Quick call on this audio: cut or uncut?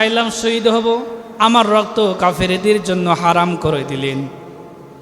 cut